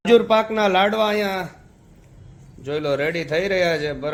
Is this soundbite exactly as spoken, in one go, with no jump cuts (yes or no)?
yes